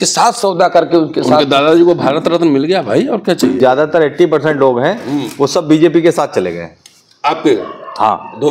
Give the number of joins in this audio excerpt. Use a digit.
1